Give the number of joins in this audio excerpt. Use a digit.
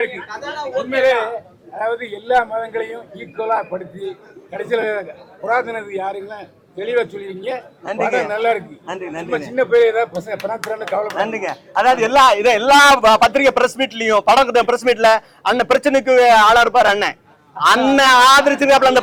0